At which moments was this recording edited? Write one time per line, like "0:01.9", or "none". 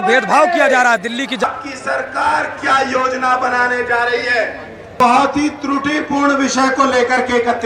0:01.4